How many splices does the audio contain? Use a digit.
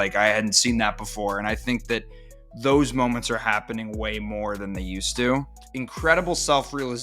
1